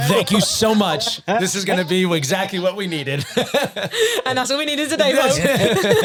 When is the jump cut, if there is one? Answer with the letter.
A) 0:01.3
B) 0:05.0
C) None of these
C